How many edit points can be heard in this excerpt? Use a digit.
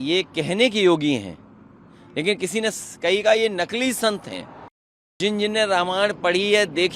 1